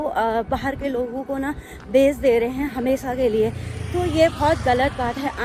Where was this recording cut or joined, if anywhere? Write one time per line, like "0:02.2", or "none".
none